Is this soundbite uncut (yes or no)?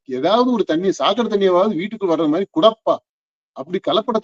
yes